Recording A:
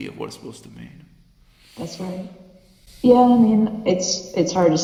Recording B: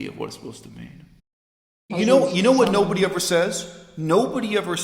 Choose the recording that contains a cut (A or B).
B